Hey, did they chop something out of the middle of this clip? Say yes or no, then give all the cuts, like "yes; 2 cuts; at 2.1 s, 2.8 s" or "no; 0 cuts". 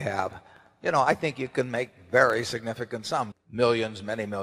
yes; 1 cut; at 3.3 s